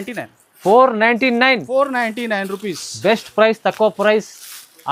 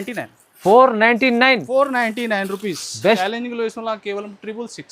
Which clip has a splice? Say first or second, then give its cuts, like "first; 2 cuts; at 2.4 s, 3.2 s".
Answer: second; 1 cut; at 3.2 s